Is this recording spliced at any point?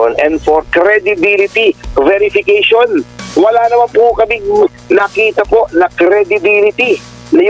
no; 0 cuts

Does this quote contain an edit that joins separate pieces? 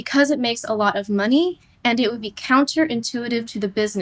no; 0 cuts

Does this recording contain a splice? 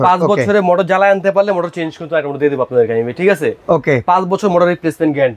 no; 0 cuts

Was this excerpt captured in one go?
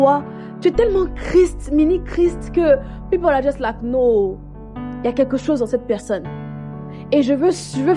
yes; 0 cuts

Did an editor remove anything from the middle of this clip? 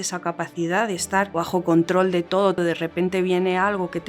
yes; 2 cuts; at 1.3 s, 2.6 s

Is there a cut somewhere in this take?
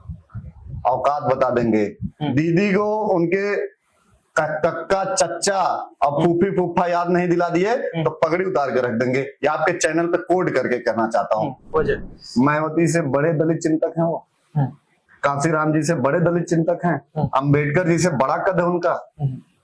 yes; 1 cut; at 11.6 s

